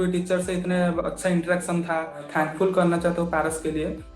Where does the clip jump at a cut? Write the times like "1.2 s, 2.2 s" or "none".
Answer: 2.2 s